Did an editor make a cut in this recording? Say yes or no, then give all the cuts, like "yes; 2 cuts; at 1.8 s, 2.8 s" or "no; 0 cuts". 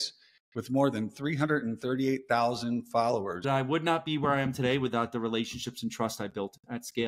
yes; 1 cut; at 3.5 s